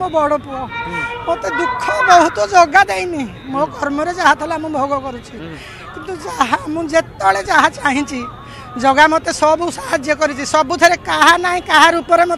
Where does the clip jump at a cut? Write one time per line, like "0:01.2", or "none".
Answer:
none